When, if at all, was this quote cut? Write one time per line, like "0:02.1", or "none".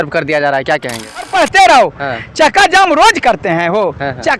0:01.3